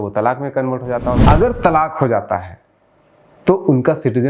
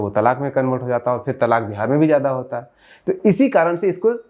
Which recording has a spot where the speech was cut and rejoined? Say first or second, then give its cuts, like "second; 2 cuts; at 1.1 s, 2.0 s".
first; 1 cut; at 1.2 s